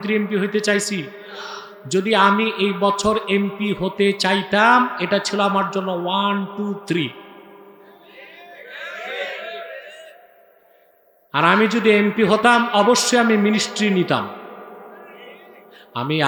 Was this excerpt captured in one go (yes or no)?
yes